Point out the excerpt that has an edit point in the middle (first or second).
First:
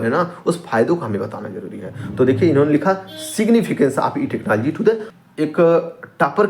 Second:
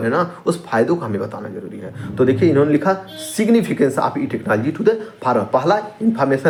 first